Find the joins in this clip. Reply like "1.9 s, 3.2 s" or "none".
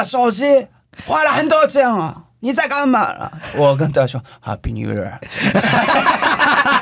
none